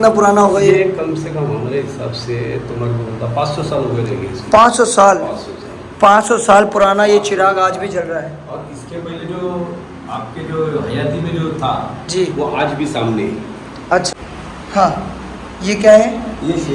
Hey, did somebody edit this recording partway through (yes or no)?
no